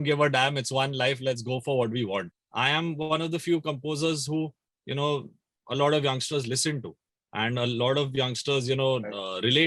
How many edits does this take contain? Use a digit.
1